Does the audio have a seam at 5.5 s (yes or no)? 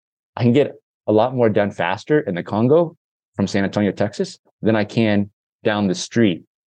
yes